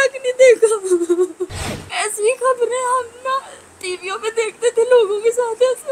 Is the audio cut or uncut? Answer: cut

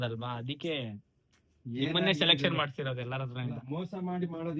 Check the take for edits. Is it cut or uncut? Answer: uncut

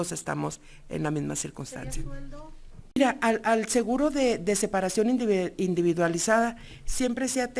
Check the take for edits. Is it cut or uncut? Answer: cut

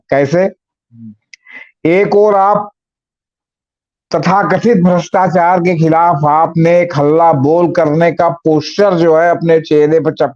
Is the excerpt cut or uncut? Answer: uncut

